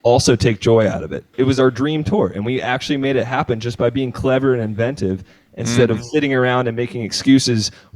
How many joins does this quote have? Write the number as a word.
one